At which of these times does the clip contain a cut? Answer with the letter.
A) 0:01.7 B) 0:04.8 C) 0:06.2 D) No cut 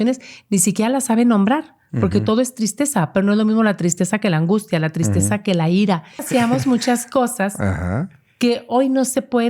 C